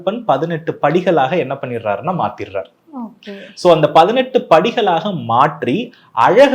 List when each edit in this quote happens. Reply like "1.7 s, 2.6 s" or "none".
none

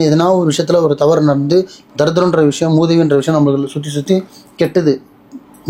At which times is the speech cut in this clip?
none

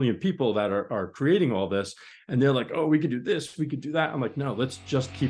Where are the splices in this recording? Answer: none

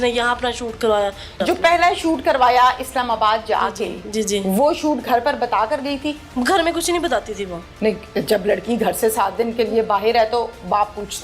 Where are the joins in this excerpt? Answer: 1.3 s, 6.3 s

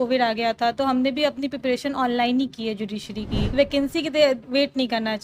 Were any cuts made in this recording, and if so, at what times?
3.5 s

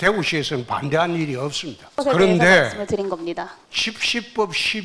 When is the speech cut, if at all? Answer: 2.0 s, 3.6 s

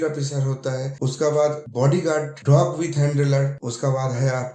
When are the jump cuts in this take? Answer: 0.9 s, 1.9 s, 3.6 s

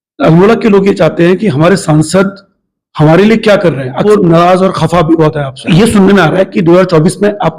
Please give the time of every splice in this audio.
4.1 s, 5.7 s

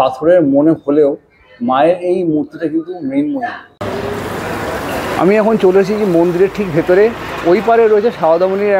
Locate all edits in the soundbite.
3.7 s

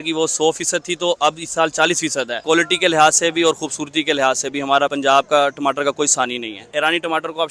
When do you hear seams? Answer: 2.4 s, 4.9 s, 6.7 s

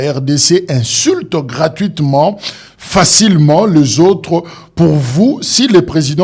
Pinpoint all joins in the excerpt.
none

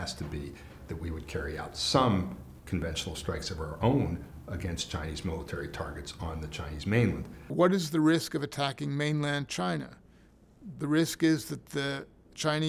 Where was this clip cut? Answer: 7.3 s

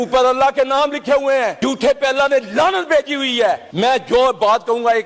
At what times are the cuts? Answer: 1.5 s, 3.7 s

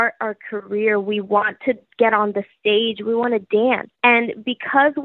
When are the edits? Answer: 3.9 s

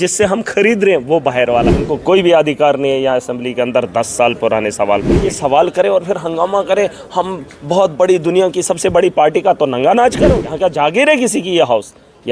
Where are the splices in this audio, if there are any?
1.8 s, 5.3 s, 10.5 s

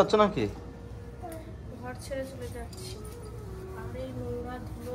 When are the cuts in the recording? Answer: none

